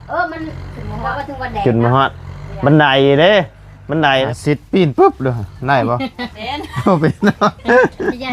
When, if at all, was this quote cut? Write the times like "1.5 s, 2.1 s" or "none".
4.3 s